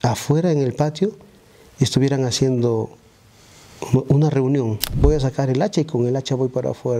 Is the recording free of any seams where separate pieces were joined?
no; 1 cut; at 4.9 s

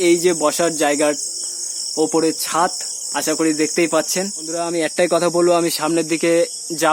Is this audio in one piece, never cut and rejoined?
no; 1 cut; at 4.6 s

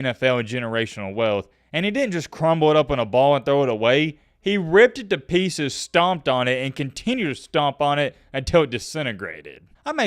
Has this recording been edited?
no; 0 cuts

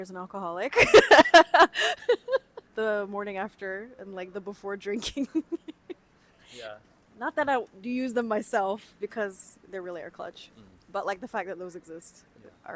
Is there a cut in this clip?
no; 0 cuts

